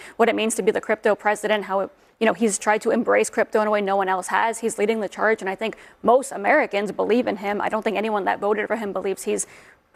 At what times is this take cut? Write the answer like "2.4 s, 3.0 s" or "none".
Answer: none